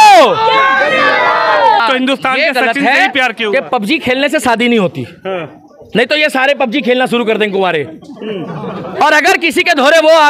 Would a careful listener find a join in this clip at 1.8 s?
yes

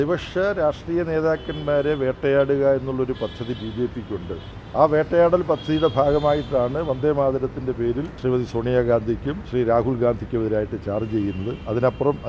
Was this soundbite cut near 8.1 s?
yes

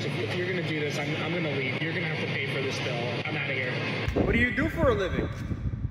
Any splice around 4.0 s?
yes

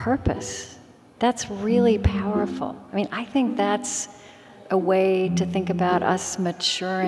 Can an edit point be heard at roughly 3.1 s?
no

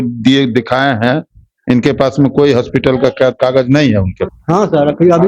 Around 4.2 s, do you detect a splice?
yes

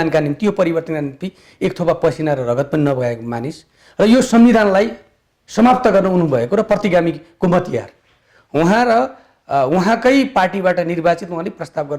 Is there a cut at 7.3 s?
no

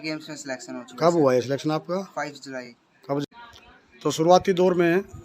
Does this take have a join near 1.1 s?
no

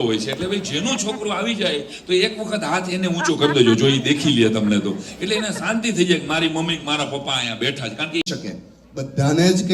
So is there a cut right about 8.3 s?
yes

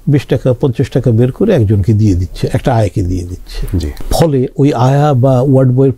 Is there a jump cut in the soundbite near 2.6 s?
no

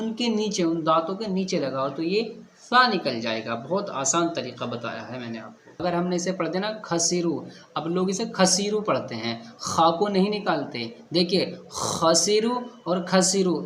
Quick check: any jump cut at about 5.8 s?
yes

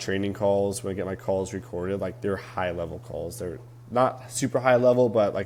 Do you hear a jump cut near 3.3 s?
no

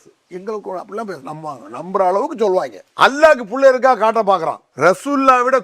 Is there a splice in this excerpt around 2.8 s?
yes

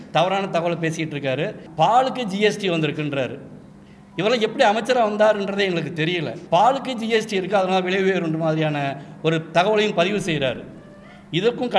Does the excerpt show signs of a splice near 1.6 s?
yes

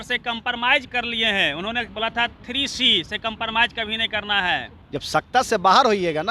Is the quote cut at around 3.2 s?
no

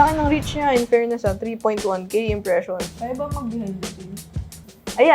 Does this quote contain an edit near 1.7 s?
no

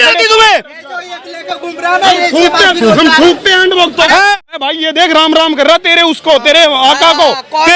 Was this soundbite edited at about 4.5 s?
yes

